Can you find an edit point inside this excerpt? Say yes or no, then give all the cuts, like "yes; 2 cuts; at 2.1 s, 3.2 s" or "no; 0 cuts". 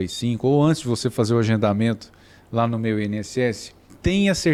no; 0 cuts